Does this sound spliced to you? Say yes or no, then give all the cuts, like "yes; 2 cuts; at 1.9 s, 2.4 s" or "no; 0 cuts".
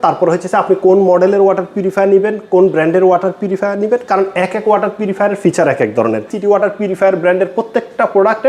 yes; 1 cut; at 6.3 s